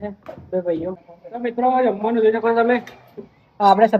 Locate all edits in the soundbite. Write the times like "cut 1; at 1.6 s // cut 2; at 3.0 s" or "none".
cut 1; at 1.1 s